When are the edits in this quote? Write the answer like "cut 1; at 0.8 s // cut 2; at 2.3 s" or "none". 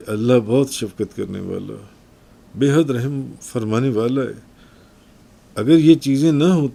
none